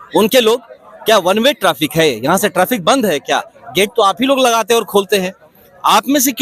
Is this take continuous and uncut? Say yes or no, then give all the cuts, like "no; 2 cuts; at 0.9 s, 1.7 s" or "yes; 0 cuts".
yes; 0 cuts